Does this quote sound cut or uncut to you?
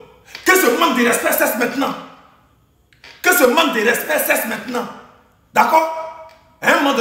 uncut